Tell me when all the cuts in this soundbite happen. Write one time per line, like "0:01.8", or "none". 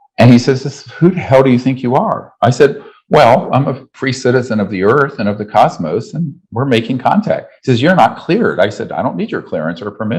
none